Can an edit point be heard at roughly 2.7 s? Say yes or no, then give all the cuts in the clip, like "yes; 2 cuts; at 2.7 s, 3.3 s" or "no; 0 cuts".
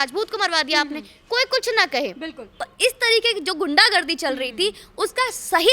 yes; 1 cut; at 2.7 s